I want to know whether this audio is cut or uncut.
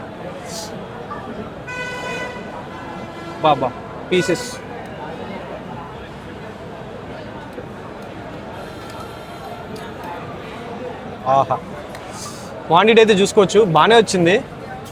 uncut